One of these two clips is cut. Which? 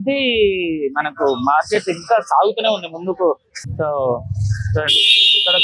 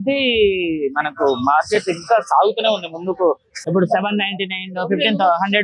second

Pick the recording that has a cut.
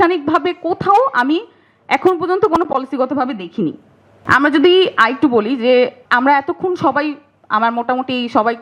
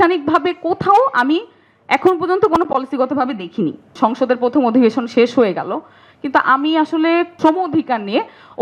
second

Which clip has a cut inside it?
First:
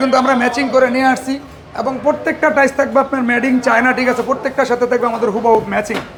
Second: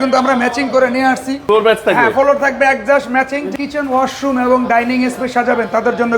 second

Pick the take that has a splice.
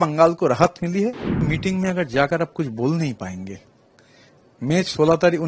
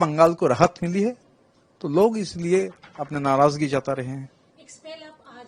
first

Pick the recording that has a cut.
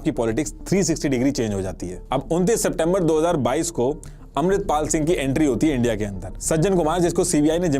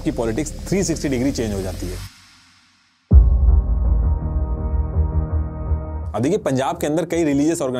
first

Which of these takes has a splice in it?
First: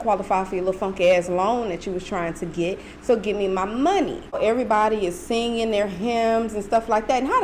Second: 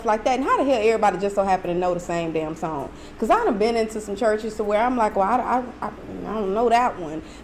first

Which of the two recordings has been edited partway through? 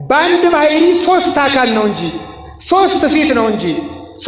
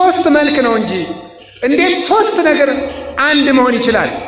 second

